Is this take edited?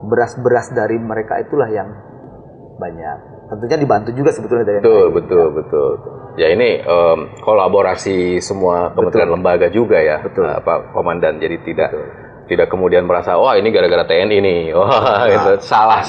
no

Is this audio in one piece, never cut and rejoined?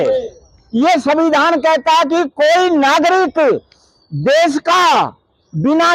yes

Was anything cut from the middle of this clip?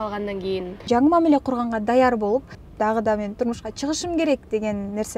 yes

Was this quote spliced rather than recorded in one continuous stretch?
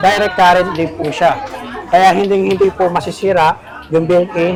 no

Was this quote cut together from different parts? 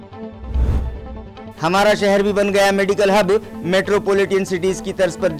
yes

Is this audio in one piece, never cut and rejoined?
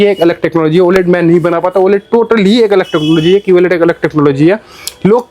yes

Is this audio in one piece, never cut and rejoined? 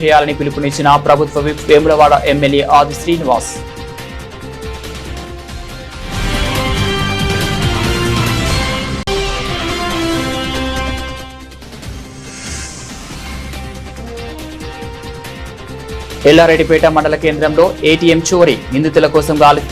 no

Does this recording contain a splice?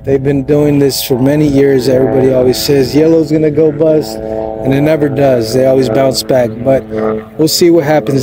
no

